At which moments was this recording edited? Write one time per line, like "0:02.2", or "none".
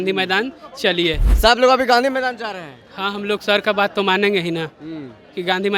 0:01.3